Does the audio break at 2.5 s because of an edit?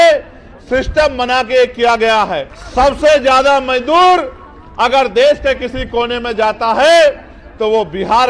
yes; 1 cut; at 2.5 s

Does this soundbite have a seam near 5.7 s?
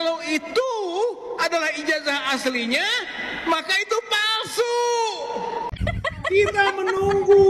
yes; 1 cut; at 5.7 s

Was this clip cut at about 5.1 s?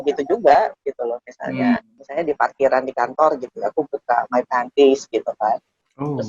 no; 1 cut; at 2.0 s

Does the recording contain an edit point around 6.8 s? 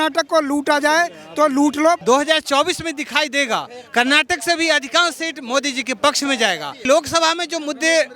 yes; 2 cuts; at 2.0 s, 6.8 s

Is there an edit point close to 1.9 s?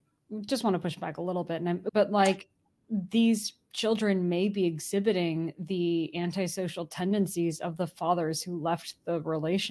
yes; 1 cut; at 1.9 s

